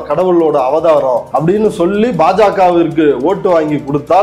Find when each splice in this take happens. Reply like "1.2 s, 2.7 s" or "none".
1.3 s